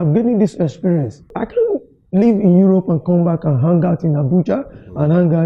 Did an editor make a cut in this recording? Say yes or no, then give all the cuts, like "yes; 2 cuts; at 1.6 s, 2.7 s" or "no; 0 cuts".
yes; 1 cut; at 1.4 s